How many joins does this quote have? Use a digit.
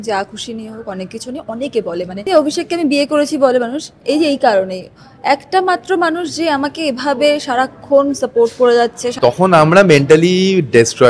2